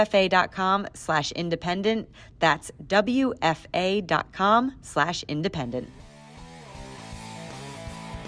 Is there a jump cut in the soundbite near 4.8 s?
no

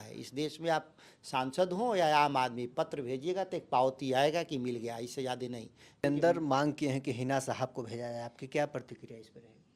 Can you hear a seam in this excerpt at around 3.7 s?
no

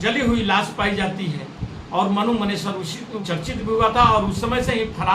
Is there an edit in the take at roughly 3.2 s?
yes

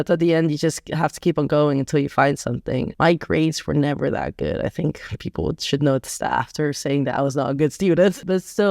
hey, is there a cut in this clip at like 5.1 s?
no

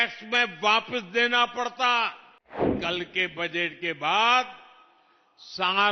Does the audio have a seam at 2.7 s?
yes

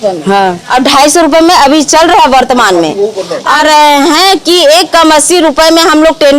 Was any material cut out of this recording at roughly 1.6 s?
no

